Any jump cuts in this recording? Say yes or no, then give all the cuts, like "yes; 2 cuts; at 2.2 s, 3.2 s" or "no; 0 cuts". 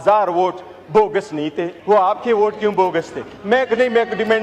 yes; 1 cut; at 1.7 s